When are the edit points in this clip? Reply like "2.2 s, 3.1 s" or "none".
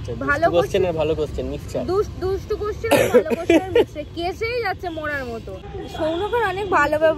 5.6 s